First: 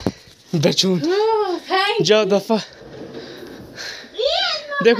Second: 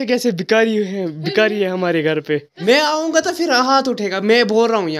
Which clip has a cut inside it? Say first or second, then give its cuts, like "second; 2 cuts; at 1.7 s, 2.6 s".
second; 1 cut; at 2.5 s